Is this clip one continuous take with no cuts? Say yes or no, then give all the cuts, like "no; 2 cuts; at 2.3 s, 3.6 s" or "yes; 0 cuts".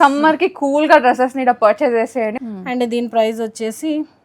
no; 1 cut; at 2.3 s